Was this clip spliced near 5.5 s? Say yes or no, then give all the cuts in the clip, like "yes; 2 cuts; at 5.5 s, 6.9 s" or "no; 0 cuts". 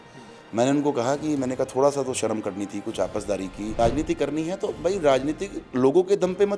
no; 1 cut; at 3.7 s